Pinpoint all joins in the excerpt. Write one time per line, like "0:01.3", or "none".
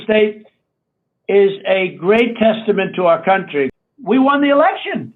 0:03.8

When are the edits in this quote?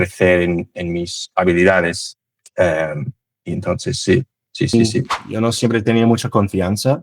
0:04.7

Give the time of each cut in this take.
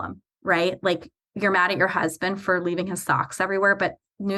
none

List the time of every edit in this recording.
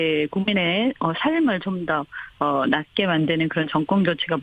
0:02.2

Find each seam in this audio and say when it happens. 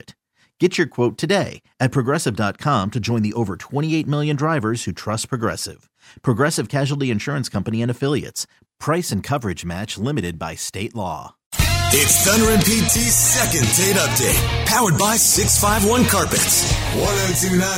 0:11.4

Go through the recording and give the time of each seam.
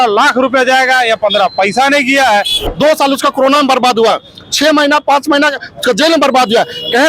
0:02.6

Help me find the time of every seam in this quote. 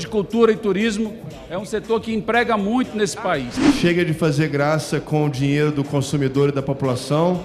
0:03.5

